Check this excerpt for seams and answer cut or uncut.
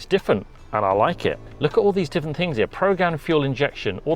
cut